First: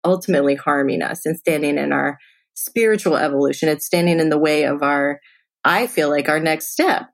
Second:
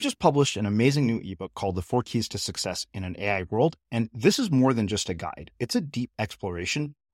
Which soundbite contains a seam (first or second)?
first